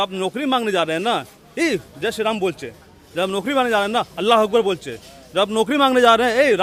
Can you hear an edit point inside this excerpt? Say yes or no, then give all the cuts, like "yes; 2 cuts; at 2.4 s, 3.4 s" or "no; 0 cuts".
no; 0 cuts